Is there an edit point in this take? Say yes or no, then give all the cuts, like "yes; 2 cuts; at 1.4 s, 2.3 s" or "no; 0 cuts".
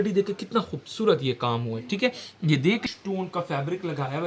yes; 1 cut; at 2.8 s